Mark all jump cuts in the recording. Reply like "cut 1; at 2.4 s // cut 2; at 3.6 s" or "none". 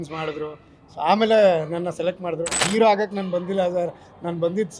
cut 1; at 2.7 s